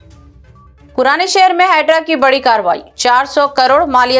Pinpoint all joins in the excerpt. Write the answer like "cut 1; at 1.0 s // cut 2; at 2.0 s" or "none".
cut 1; at 0.9 s